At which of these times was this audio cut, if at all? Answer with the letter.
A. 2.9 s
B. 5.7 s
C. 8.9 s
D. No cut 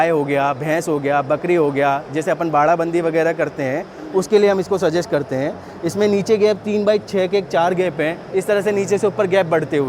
D